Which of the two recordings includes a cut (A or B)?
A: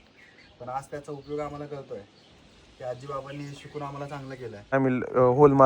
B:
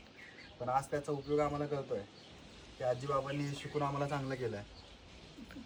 A